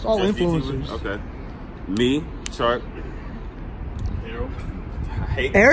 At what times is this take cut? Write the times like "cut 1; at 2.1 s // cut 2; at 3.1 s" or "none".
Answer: none